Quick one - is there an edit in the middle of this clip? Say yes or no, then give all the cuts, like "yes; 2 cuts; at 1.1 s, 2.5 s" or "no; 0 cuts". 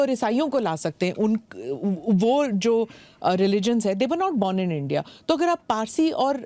no; 0 cuts